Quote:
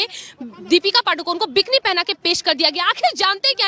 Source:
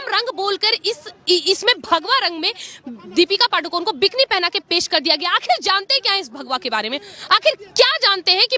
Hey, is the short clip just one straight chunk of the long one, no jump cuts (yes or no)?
yes